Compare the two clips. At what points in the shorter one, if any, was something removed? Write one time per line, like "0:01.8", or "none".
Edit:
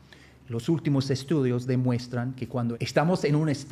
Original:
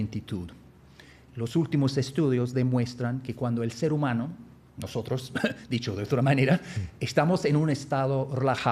0:02.8